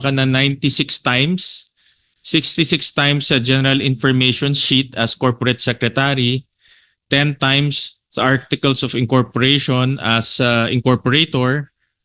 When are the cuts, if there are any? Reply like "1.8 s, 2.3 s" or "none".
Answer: none

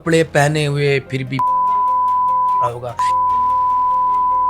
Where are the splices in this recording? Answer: none

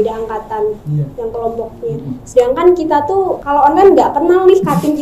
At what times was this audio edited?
3.4 s

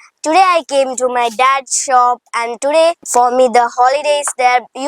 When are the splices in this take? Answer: 3.0 s

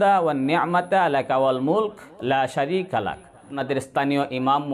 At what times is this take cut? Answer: 3.5 s

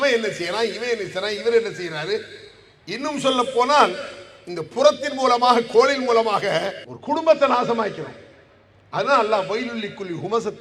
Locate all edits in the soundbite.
none

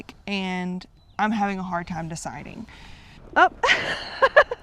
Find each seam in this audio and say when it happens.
3.2 s

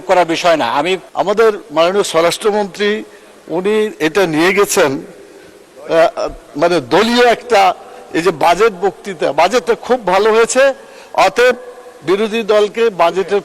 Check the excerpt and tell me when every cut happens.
1.1 s

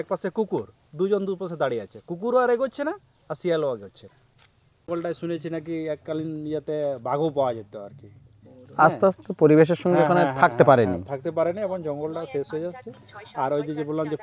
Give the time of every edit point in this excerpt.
4.9 s

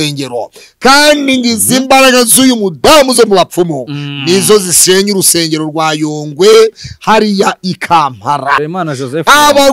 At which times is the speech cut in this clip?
8.7 s

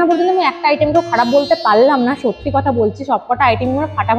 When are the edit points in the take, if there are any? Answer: none

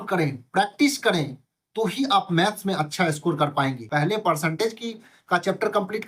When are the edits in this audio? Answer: 3.8 s

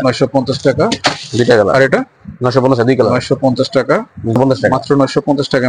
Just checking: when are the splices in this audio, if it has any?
4.4 s

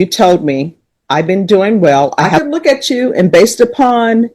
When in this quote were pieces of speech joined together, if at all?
2.3 s

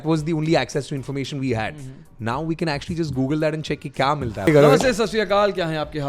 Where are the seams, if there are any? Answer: 4.5 s

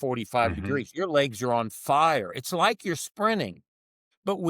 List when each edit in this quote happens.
none

